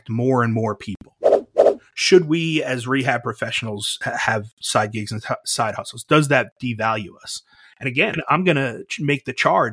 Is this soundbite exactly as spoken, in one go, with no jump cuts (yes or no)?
no